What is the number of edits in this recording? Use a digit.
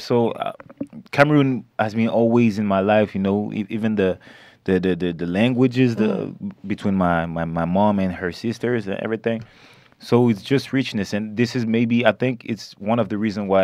0